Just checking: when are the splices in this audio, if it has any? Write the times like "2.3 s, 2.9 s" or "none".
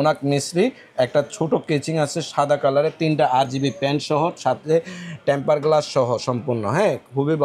none